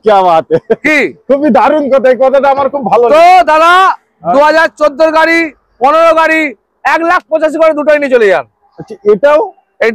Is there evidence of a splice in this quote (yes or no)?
no